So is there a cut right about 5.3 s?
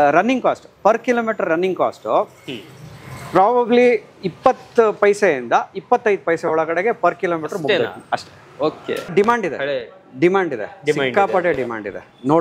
no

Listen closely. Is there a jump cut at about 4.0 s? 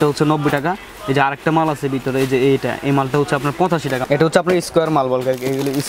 yes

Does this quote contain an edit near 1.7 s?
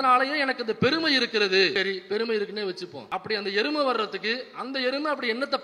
yes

